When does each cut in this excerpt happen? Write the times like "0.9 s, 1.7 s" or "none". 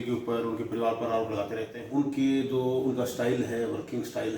1.8 s